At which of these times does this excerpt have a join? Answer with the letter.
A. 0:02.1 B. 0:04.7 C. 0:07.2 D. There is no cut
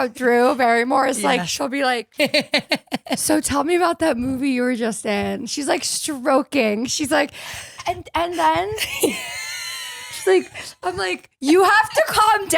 A